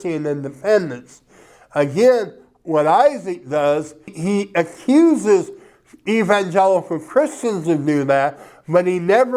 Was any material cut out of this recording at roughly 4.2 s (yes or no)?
yes